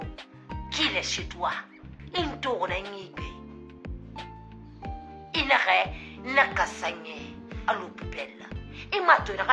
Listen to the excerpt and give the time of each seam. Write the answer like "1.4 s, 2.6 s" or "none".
3.1 s, 5.3 s